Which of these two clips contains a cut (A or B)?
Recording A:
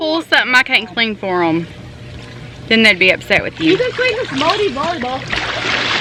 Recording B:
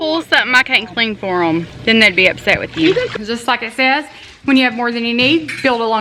B